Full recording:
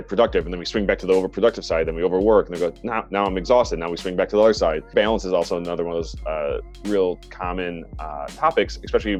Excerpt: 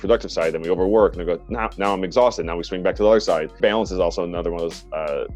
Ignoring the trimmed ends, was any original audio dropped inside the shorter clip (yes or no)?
no